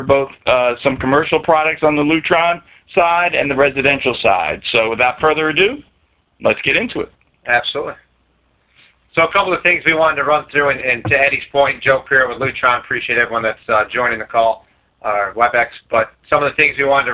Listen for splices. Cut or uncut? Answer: uncut